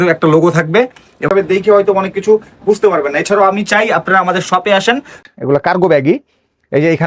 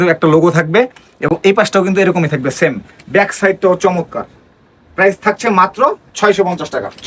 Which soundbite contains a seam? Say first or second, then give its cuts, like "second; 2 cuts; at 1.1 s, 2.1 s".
first; 2 cuts; at 1.3 s, 5.2 s